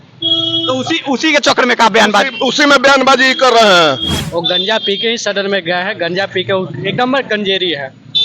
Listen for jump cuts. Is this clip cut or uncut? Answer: cut